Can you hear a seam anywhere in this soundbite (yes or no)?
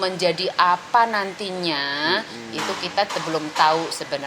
no